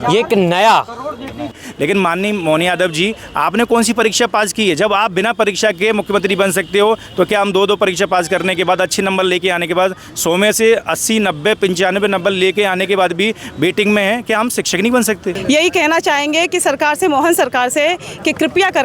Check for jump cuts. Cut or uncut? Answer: cut